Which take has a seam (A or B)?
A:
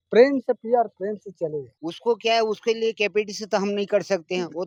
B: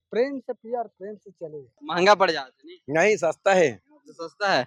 B